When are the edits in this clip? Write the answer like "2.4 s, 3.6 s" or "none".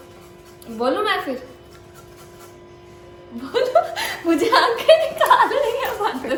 none